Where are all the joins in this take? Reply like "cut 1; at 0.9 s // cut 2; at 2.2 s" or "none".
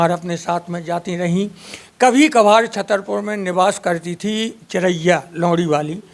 none